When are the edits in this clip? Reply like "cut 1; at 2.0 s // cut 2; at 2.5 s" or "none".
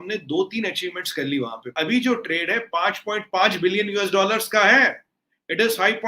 cut 1; at 1.6 s

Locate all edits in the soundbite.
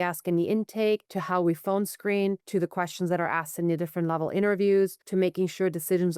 cut 1; at 1.1 s // cut 2; at 2.4 s // cut 3; at 5.0 s

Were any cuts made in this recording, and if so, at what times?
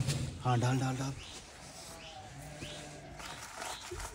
none

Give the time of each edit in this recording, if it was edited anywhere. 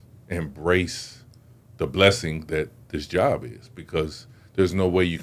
none

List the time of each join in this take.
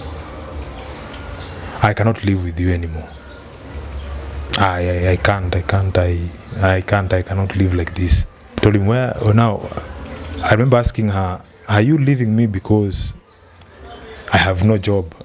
cut 1; at 8.4 s

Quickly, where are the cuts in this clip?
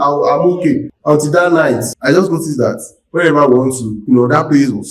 cut 1; at 0.9 s // cut 2; at 1.9 s // cut 3; at 3.9 s

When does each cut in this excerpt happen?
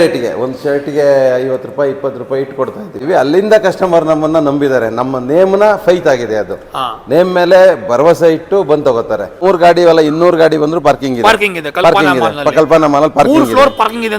cut 1; at 3.0 s // cut 2; at 9.4 s

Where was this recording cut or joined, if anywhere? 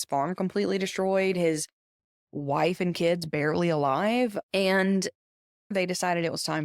cut 1; at 5.7 s

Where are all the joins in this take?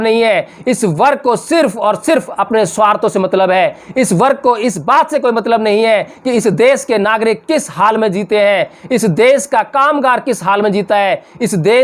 none

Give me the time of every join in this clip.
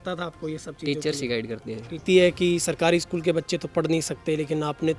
cut 1; at 2.0 s

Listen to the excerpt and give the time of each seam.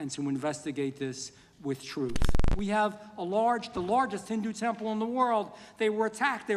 cut 1; at 2.3 s

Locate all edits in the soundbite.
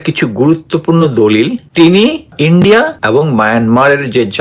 cut 1; at 1.6 s // cut 2; at 2.3 s // cut 3; at 3.0 s

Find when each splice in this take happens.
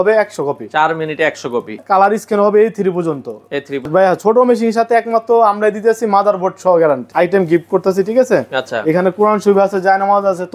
cut 1; at 1.8 s // cut 2; at 3.9 s // cut 3; at 7.1 s

